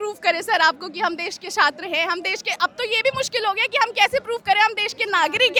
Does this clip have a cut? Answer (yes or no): no